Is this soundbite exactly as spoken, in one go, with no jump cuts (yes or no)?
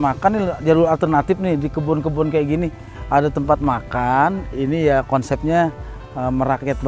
yes